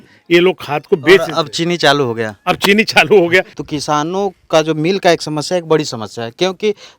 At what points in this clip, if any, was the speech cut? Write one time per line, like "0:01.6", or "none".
0:03.6

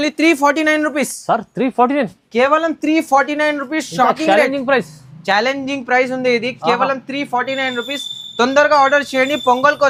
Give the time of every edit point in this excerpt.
none

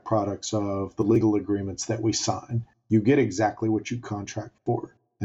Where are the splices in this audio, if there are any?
none

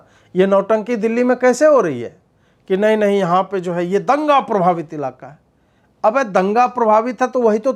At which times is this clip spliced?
none

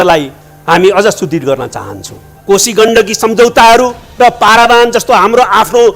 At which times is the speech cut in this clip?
0:02.3

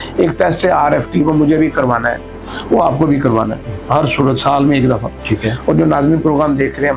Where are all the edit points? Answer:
none

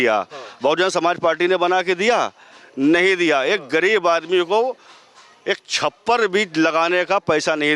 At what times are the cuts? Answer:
none

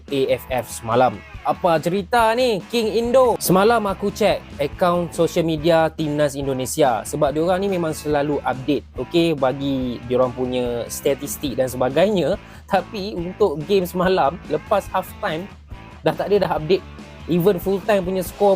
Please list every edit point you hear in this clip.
0:03.4

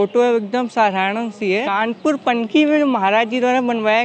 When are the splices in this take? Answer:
0:01.7

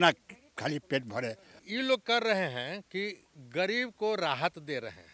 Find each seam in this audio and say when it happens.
0:01.6

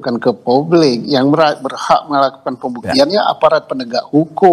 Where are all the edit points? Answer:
none

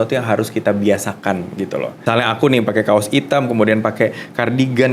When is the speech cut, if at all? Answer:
0:01.9

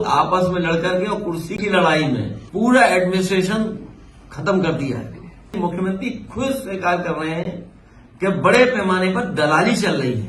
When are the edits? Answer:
0:02.4
0:05.5

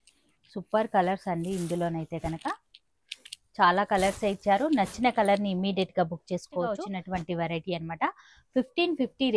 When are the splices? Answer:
0:06.9

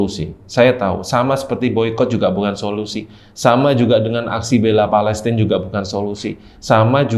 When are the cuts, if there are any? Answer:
none

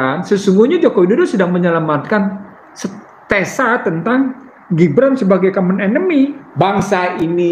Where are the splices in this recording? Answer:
0:06.4

